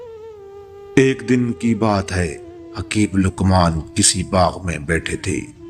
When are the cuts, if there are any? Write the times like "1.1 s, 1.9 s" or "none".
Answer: 0.9 s